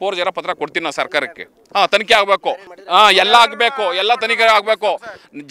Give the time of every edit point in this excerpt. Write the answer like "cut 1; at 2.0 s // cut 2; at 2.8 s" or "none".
none